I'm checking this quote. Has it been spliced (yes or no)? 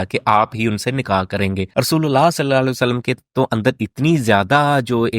yes